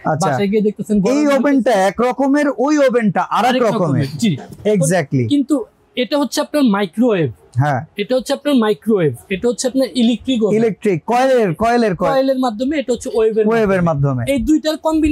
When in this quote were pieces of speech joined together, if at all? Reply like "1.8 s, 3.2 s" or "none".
none